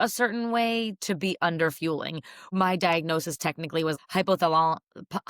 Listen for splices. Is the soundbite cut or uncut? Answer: cut